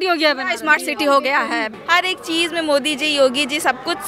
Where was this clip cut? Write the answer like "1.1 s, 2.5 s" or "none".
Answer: 1.8 s